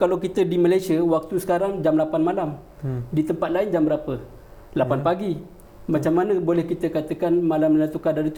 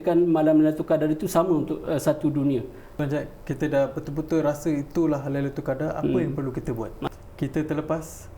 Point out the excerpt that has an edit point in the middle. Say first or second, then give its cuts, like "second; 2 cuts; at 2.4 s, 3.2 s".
second; 2 cuts; at 2.9 s, 7.0 s